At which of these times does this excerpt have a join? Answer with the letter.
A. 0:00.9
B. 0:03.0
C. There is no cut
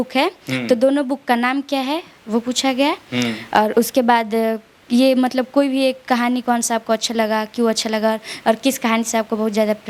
C